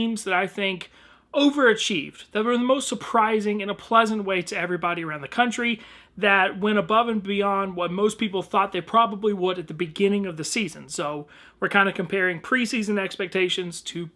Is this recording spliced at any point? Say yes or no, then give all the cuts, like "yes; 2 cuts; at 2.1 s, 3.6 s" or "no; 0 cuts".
no; 0 cuts